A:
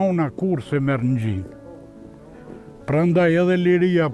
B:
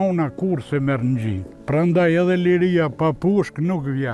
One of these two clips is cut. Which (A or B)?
B